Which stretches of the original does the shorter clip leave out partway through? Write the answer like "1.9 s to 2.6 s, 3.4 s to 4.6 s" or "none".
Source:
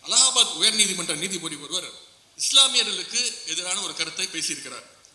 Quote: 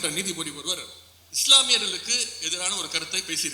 none